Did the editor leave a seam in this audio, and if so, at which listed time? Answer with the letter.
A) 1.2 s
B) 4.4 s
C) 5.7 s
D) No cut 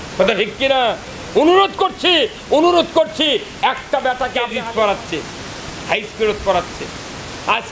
B